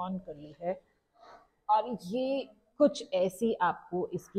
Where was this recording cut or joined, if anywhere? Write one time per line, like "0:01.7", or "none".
none